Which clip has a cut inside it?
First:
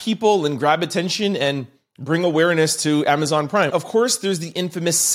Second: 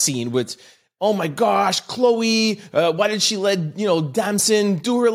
first; 1 cut; at 3.7 s

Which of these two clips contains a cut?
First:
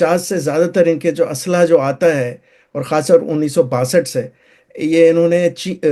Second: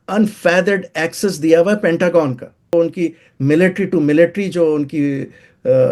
second; 1 cut; at 2.7 s

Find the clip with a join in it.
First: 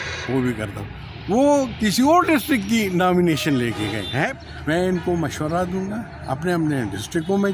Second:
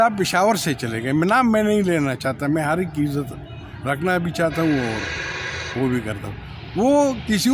first; 1 cut; at 4.3 s

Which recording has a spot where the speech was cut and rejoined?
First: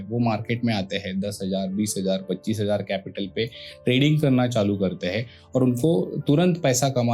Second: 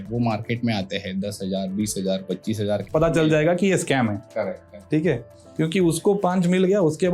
second; 1 cut; at 2.8 s

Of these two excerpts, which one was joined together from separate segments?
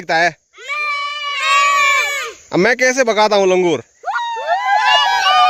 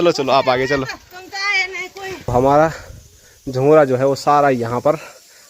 second; 1 cut; at 2.3 s

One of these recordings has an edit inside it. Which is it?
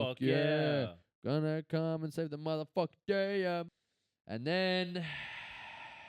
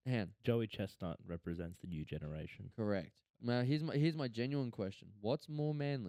first; 1 cut; at 3.7 s

